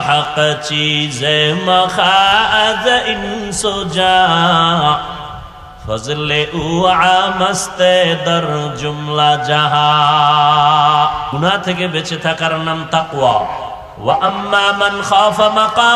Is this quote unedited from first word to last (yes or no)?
no